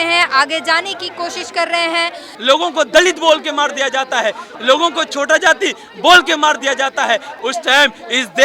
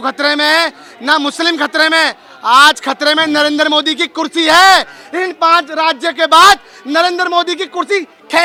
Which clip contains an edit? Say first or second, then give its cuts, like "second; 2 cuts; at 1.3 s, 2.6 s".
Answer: first; 3 cuts; at 2.3 s, 4.5 s, 7.3 s